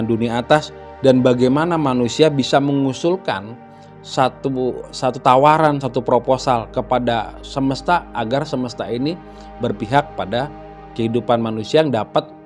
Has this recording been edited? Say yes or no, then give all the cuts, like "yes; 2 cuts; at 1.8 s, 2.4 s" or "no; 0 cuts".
no; 0 cuts